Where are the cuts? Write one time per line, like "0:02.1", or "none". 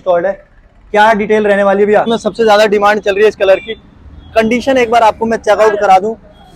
0:02.1